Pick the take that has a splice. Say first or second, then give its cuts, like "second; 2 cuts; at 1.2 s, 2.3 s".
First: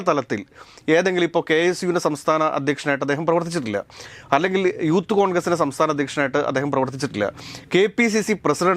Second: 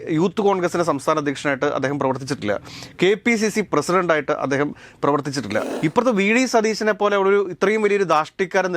second; 1 cut; at 5.7 s